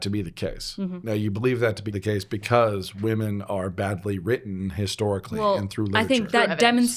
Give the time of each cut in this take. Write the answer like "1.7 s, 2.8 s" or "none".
1.0 s, 1.9 s

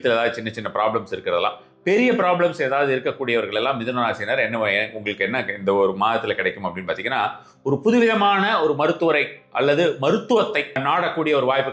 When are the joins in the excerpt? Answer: 10.8 s

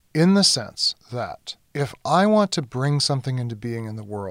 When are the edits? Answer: 1.1 s

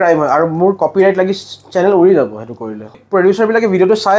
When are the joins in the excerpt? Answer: 2.9 s

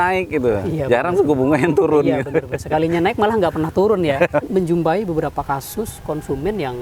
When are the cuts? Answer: 4.4 s

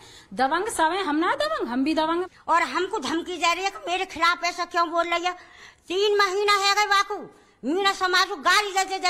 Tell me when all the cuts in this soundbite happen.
0.8 s, 2.2 s, 8.0 s

